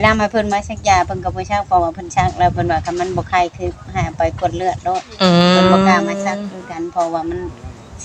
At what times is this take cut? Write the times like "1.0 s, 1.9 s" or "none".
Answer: none